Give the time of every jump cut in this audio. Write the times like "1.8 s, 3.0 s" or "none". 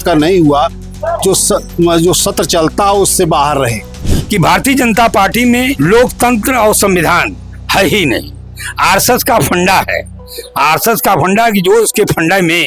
4.1 s, 5.7 s